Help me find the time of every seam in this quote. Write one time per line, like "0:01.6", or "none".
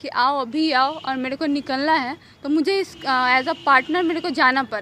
none